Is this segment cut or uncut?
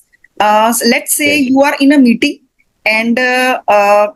uncut